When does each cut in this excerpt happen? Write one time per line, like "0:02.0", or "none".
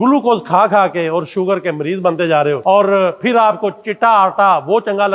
0:02.6